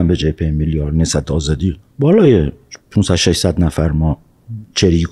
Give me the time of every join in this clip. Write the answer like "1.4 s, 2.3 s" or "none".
1.9 s